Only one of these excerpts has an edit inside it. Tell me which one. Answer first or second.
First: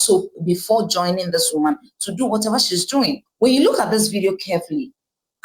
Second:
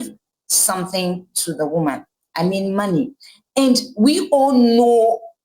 first